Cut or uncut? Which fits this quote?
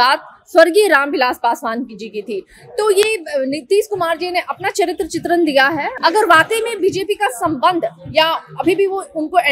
cut